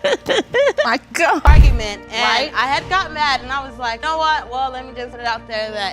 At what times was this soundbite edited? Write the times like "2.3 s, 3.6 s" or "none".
1.5 s